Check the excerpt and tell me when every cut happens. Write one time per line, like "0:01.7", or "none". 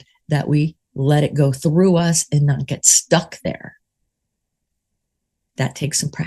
none